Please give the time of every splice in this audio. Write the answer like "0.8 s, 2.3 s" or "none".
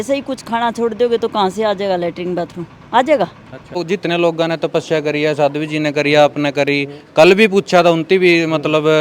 3.8 s